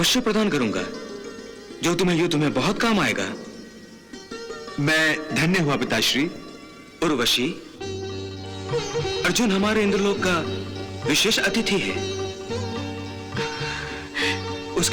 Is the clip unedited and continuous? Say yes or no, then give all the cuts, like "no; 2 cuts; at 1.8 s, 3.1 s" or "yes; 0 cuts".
yes; 0 cuts